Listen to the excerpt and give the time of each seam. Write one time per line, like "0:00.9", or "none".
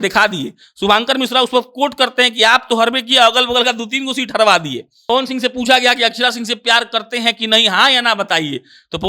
0:04.9

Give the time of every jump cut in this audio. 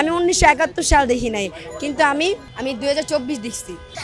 0:02.5

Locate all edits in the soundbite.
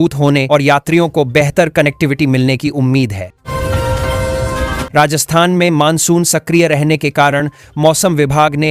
none

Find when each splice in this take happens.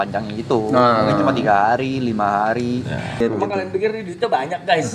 0:03.2

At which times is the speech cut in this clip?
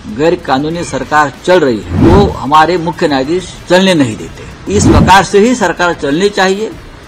0:01.9
0:04.6

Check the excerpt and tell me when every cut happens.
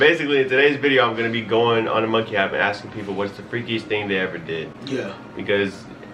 none

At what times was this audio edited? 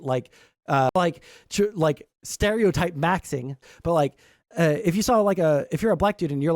0:00.9
0:03.6

